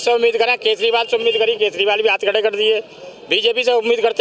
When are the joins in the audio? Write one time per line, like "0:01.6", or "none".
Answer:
none